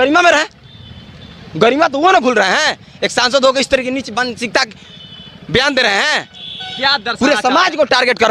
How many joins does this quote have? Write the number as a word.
zero